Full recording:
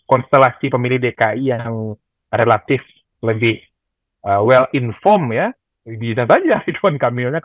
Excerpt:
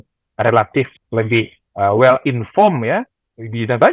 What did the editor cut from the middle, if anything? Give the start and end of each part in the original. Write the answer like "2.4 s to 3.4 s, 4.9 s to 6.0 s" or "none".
3.1 s to 3.7 s